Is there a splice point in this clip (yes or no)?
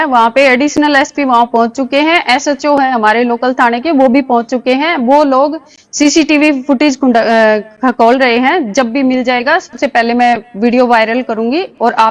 no